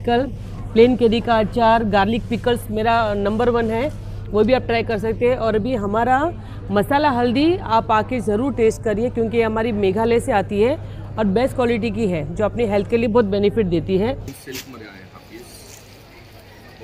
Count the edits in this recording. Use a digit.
1